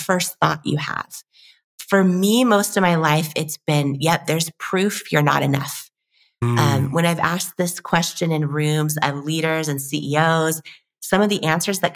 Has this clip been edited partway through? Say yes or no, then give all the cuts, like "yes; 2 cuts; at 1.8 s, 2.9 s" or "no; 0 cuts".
no; 0 cuts